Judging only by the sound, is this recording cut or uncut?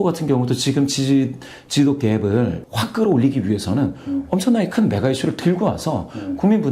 cut